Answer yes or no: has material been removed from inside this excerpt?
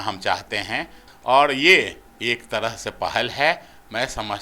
yes